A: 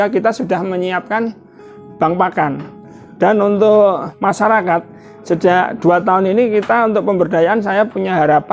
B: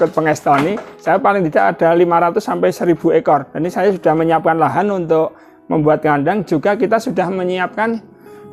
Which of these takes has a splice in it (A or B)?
A